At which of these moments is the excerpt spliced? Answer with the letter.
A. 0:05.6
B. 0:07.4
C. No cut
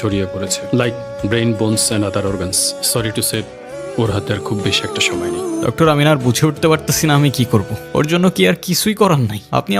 A